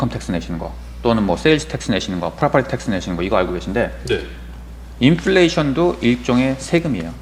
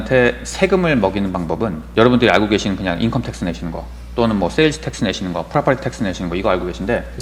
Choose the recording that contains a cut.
second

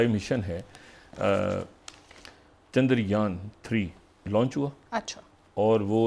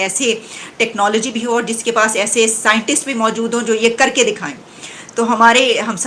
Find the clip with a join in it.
first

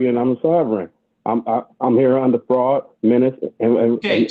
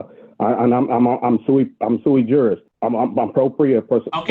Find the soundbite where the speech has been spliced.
second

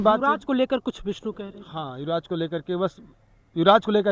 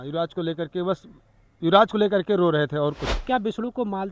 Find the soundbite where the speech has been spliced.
second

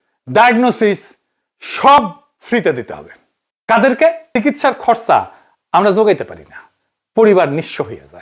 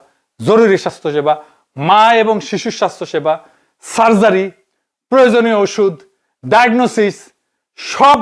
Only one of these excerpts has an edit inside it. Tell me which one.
first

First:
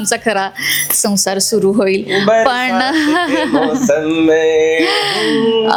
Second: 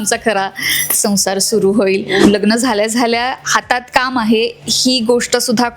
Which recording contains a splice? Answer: second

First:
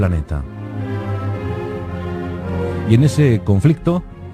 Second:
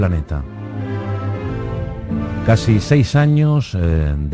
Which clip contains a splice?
first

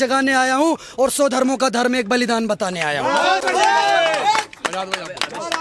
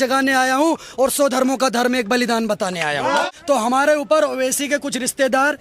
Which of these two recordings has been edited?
second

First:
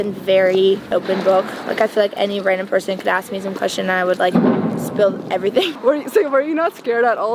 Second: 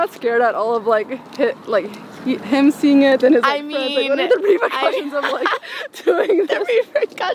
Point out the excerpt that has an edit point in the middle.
first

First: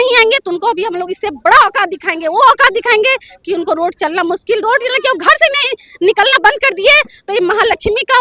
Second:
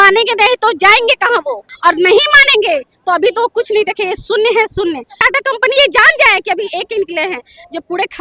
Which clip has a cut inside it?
second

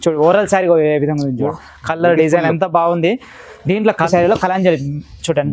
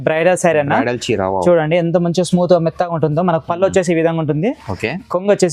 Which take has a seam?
first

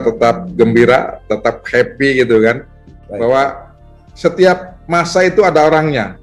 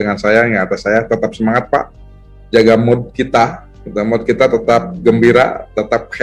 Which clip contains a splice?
first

